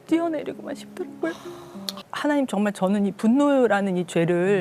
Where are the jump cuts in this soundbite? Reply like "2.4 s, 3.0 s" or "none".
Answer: 1.5 s